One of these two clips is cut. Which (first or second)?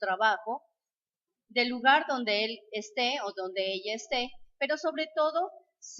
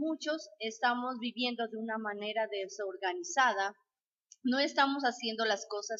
first